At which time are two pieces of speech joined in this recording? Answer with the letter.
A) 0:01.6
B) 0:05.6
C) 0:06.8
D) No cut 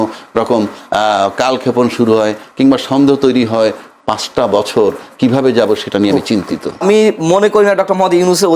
C